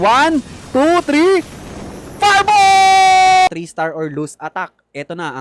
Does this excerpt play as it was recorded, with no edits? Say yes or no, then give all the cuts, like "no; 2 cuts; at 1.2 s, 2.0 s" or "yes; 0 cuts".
no; 1 cut; at 3.5 s